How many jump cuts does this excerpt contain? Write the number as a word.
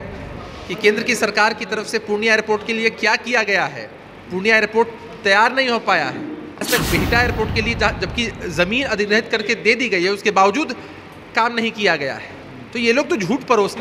one